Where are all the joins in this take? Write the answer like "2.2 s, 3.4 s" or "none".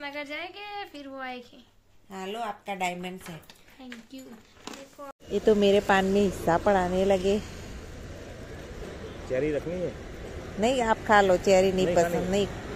5.1 s